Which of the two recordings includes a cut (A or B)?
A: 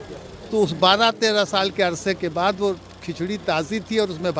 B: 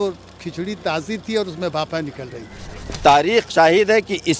B